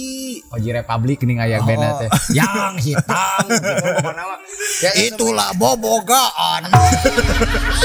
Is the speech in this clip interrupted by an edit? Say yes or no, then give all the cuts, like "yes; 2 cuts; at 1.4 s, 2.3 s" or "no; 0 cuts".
no; 0 cuts